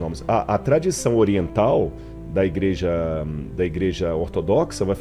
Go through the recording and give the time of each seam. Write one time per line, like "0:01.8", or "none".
none